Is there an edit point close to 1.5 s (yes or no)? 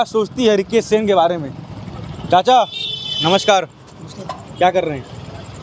no